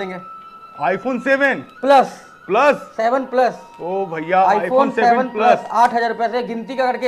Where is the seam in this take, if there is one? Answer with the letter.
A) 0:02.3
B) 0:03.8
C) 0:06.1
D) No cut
D